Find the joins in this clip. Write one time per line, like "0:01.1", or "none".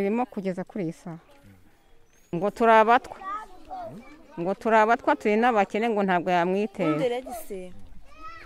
0:02.3